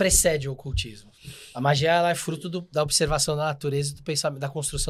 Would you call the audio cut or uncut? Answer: uncut